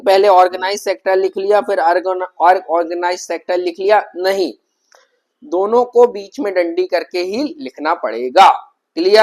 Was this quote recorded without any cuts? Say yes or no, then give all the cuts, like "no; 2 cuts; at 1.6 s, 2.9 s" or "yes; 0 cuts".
yes; 0 cuts